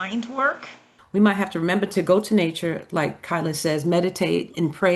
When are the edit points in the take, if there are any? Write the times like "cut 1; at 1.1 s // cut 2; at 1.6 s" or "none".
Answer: cut 1; at 1.0 s